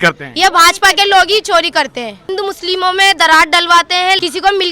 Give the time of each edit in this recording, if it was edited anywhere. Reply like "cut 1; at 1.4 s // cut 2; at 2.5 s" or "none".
cut 1; at 2.3 s